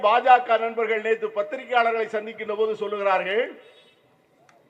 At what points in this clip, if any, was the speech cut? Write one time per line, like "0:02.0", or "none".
none